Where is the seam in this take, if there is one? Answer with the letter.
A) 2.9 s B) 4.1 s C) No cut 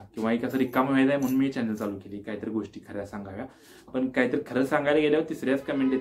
C